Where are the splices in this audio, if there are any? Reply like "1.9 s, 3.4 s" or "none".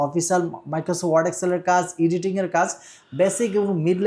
none